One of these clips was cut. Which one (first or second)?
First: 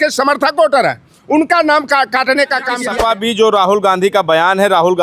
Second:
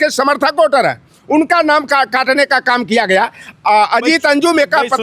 first